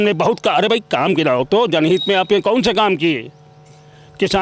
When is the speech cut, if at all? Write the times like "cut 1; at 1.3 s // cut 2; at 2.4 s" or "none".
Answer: none